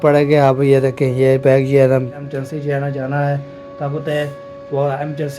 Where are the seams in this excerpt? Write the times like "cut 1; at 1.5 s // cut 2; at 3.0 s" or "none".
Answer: cut 1; at 2.2 s